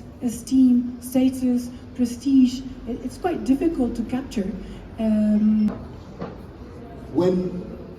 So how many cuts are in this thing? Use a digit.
0